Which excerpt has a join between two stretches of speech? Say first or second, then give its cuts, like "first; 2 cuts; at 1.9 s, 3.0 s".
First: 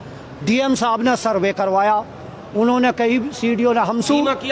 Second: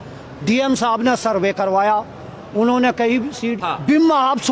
second; 1 cut; at 3.5 s